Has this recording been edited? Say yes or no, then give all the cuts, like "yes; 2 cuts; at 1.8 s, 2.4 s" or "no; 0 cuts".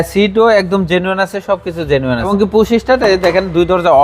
yes; 1 cut; at 2.3 s